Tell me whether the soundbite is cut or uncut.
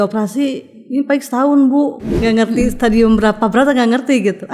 cut